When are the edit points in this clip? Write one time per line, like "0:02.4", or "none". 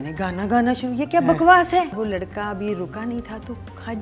0:01.9

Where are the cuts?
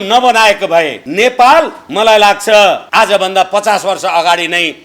0:01.0
0:01.8
0:02.9

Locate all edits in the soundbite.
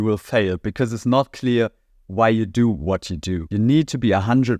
0:03.4

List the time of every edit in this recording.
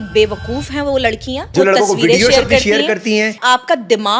0:01.5
0:03.4

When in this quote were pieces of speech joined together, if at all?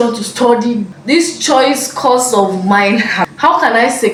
none

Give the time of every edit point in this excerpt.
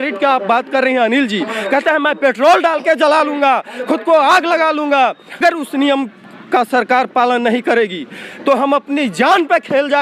0:05.4

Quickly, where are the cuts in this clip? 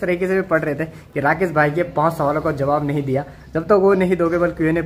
none

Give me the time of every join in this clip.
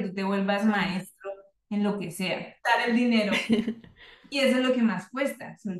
0:02.8

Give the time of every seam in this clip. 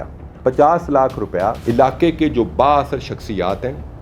0:01.6

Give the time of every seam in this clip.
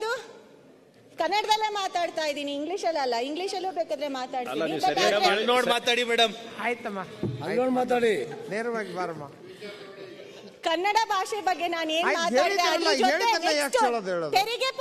none

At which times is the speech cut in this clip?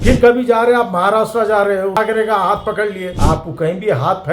0:02.0
0:03.2

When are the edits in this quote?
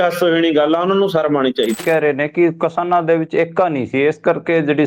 0:01.8

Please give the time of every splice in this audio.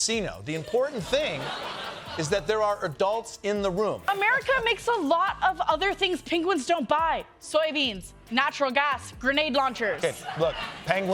none

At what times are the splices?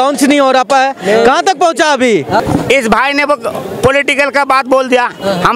0:02.4

